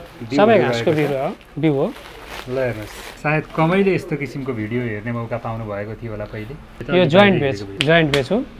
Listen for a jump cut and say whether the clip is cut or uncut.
cut